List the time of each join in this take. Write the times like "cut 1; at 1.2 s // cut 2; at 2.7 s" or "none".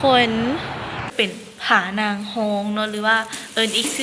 cut 1; at 1.1 s